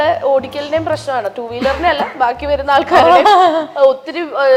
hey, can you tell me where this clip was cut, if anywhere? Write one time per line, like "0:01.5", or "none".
none